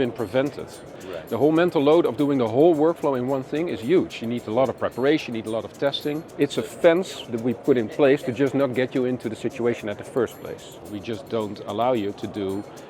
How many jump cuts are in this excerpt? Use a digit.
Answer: 3